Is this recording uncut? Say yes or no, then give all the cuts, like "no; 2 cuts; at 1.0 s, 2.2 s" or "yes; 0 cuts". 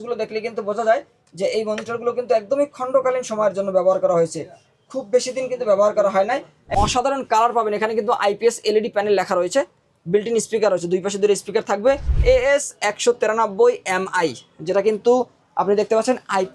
no; 2 cuts; at 6.6 s, 12.1 s